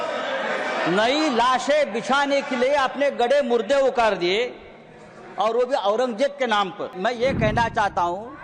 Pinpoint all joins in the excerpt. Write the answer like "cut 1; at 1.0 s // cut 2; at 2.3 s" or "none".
cut 1; at 6.9 s